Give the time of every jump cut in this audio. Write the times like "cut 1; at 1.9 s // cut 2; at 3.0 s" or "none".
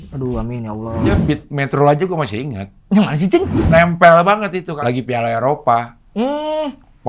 cut 1; at 1.1 s // cut 2; at 3.6 s // cut 3; at 4.7 s

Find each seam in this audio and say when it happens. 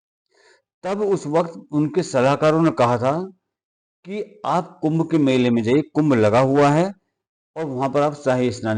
none

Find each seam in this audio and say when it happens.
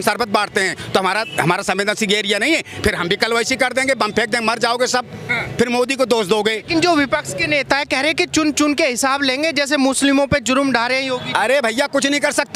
none

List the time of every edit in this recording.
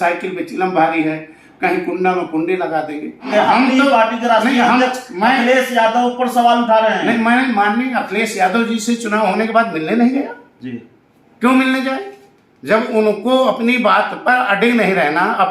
cut 1; at 3.3 s

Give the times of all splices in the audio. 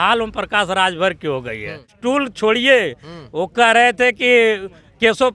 cut 1; at 1.9 s

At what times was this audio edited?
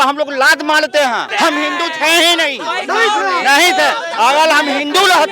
cut 1; at 1.3 s

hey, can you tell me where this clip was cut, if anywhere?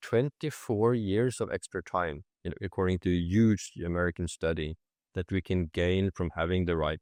none

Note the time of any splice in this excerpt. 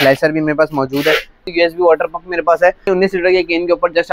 cut 1; at 1.5 s // cut 2; at 2.9 s

